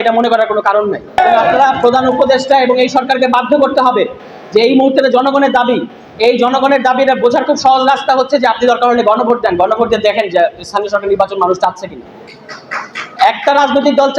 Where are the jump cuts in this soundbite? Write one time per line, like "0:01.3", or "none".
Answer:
0:01.2